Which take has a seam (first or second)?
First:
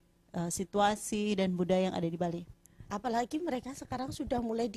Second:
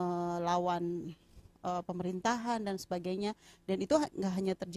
first